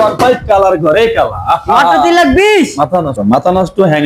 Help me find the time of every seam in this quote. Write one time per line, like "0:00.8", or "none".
0:03.2